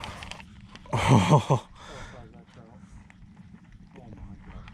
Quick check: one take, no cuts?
no; 1 cut; at 1.7 s

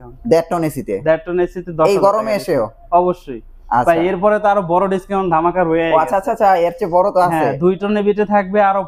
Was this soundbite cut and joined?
no; 0 cuts

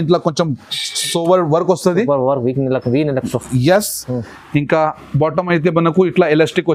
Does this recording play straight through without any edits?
yes; 0 cuts

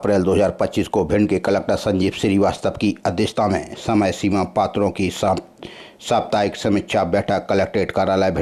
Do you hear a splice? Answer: no; 0 cuts

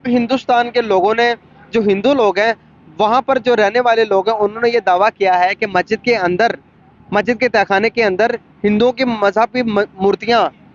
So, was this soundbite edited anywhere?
no; 0 cuts

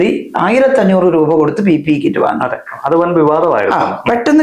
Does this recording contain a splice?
no; 0 cuts

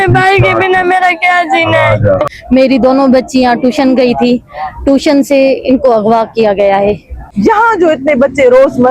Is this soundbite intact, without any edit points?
no; 2 cuts; at 2.2 s, 7.2 s

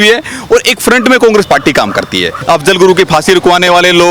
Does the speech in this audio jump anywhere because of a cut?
yes; 1 cut; at 2.3 s

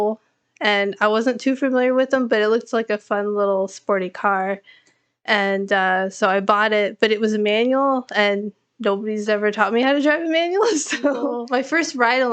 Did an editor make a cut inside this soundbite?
yes; 1 cut; at 11.4 s

